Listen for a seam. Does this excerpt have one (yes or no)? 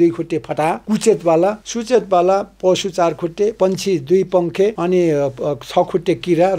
yes